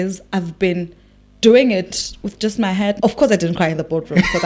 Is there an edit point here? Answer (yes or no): yes